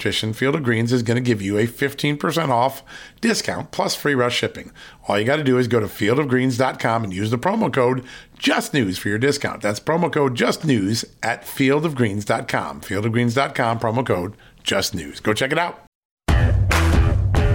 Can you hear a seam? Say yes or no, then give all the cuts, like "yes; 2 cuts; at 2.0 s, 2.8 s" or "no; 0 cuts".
yes; 1 cut; at 16.1 s